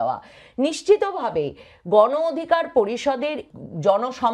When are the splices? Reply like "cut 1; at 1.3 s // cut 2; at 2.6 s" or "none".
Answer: cut 1; at 3.4 s